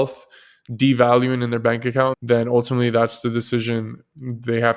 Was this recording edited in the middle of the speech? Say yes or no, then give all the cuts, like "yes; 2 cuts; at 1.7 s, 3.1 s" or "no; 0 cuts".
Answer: yes; 1 cut; at 2.2 s